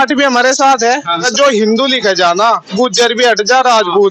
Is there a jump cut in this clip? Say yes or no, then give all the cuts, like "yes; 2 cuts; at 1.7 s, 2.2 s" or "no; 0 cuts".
yes; 1 cut; at 1.3 s